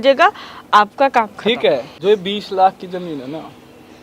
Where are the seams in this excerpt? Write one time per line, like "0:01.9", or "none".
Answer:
0:01.9